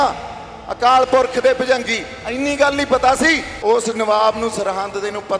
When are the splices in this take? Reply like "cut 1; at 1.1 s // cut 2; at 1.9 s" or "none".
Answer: cut 1; at 3.5 s